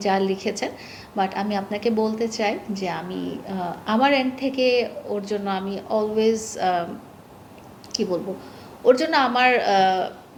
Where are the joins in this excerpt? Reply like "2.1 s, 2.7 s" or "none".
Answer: none